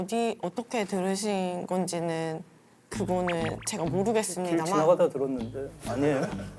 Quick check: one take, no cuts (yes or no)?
yes